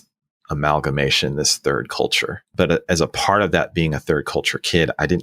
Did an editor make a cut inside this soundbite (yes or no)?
yes